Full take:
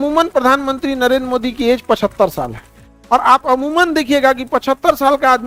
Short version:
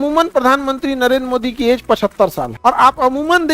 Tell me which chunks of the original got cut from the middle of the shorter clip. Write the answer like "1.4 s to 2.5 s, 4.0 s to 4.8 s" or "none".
2.5 s to 2.9 s